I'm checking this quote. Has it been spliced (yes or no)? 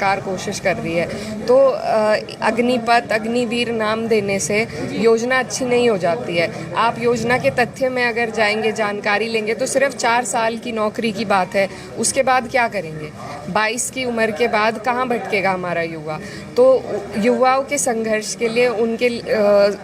no